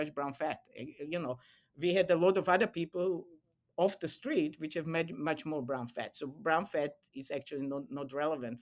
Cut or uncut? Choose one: uncut